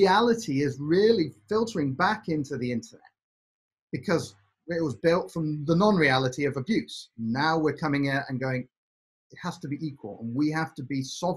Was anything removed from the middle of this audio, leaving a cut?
no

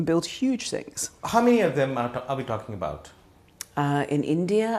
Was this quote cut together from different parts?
yes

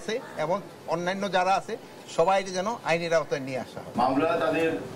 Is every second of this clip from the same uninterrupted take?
no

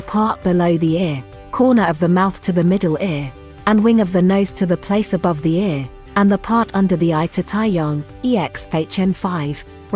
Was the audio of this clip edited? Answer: no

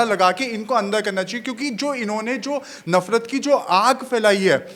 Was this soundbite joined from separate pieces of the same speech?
no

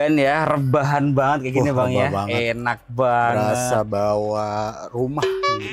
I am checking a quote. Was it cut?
no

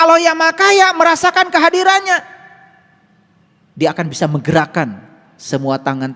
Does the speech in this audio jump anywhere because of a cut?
no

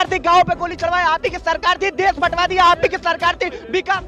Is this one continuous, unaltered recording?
yes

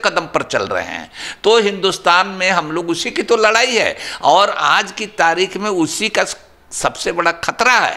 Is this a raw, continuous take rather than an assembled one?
yes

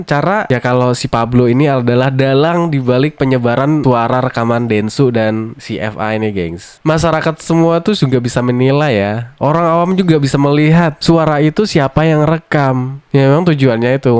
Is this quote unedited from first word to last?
yes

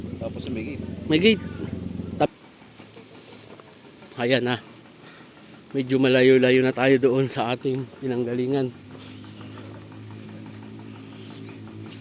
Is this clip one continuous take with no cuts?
no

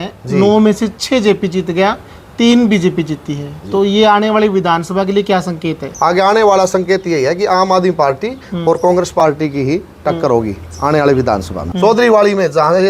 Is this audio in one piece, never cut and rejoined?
no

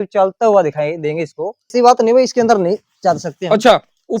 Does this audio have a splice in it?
yes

